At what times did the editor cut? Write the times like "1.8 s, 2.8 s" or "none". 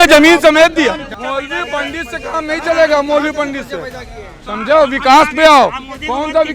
1.1 s